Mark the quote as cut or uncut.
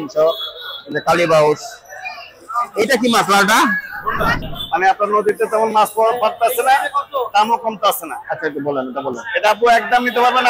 cut